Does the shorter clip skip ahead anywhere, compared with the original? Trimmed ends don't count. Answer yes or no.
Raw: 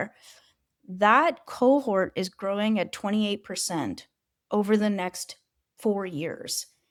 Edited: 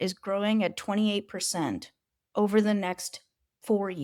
no